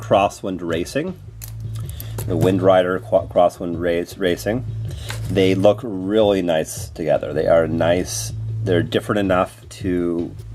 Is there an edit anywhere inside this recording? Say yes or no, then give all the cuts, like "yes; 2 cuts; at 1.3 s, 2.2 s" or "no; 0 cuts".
no; 0 cuts